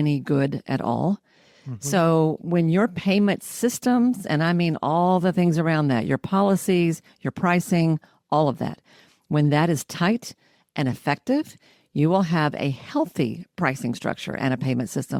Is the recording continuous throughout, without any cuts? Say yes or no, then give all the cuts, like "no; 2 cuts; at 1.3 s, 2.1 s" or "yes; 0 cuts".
yes; 0 cuts